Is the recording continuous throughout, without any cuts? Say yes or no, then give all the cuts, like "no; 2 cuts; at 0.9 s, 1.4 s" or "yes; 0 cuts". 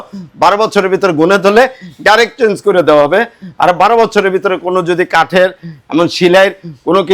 yes; 0 cuts